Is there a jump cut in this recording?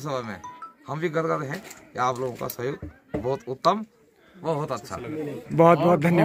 no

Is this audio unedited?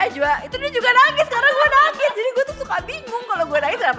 yes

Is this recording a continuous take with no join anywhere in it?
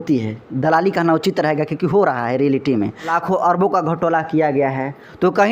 no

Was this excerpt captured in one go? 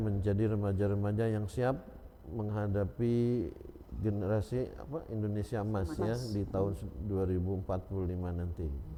yes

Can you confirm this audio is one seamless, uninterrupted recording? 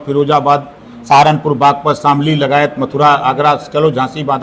yes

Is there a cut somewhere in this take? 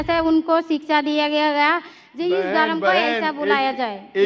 no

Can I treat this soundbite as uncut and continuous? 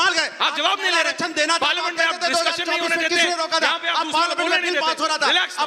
yes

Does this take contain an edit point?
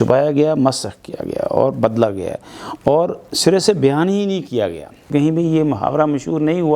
yes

